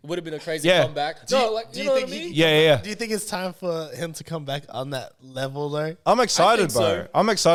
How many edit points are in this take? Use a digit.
0